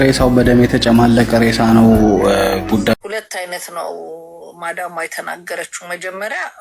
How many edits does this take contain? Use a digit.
2